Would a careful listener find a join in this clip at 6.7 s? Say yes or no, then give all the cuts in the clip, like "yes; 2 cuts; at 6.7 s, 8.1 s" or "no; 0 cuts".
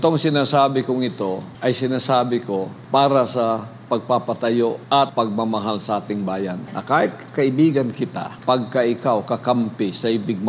yes; 5 cuts; at 1.5 s, 2.8 s, 5.0 s, 6.7 s, 8.3 s